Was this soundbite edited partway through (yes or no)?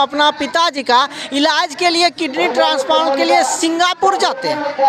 no